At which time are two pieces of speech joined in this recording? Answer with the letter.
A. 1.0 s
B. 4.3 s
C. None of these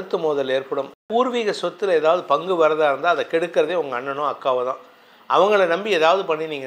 A